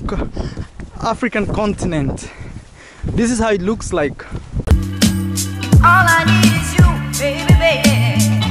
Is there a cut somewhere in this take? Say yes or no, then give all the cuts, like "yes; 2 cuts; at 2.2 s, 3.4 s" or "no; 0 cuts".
yes; 1 cut; at 4.6 s